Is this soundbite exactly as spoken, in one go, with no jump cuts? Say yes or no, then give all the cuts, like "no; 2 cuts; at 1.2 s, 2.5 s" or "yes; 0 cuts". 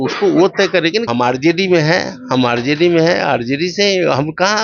no; 1 cut; at 1.1 s